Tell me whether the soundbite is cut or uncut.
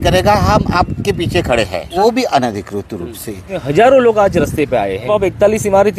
cut